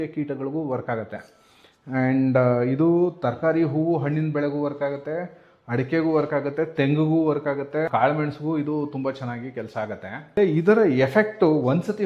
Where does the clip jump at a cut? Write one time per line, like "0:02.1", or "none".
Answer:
0:07.9
0:10.4